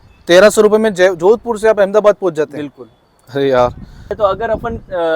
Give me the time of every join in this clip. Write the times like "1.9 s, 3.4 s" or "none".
4.2 s